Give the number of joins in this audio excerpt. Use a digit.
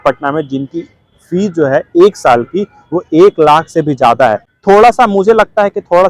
1